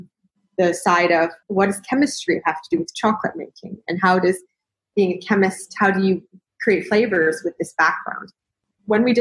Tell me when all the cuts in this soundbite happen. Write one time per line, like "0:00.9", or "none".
0:01.4